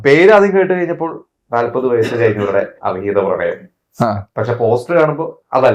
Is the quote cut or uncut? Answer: uncut